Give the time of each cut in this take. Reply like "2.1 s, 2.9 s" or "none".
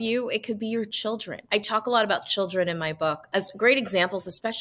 1.4 s